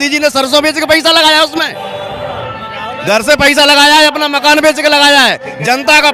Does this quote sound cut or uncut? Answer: uncut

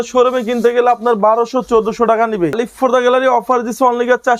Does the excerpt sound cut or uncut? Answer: cut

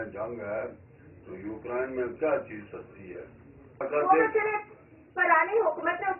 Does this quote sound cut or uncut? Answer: cut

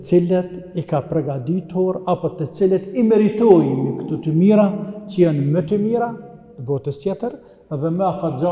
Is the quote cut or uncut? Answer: uncut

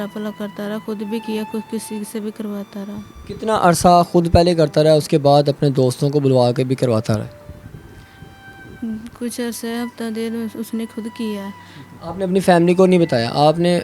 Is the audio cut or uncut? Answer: uncut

